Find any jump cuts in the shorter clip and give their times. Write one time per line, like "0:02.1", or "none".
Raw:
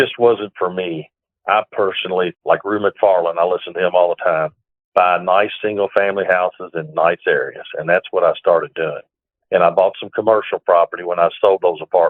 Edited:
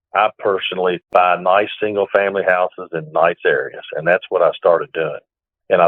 0:01.0